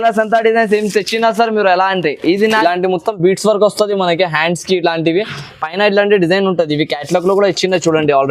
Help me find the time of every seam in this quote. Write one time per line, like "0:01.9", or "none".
0:02.6